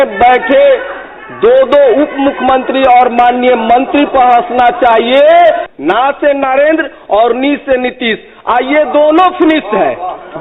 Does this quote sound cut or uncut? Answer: cut